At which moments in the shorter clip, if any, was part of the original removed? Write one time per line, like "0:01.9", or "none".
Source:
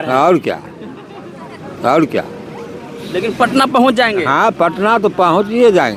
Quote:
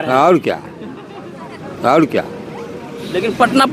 none